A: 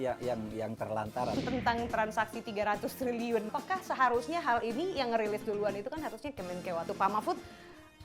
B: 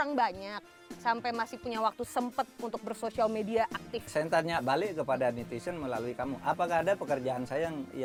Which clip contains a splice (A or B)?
A